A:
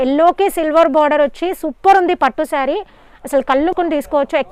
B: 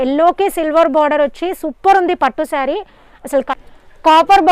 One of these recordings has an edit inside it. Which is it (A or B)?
B